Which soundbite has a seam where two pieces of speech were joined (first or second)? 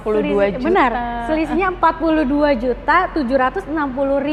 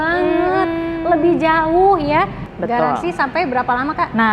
second